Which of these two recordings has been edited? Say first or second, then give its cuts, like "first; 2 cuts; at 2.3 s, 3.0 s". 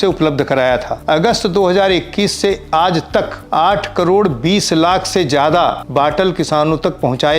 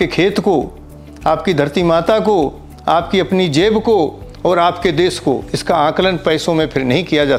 first; 3 cuts; at 0.9 s, 3.4 s, 5.8 s